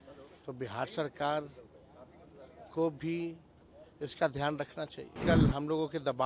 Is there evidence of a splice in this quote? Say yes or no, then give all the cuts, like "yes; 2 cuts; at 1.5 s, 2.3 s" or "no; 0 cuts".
yes; 1 cut; at 5.2 s